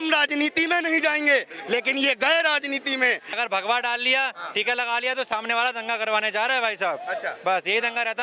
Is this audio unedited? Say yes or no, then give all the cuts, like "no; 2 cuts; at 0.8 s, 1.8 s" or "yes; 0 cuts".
no; 1 cut; at 3.4 s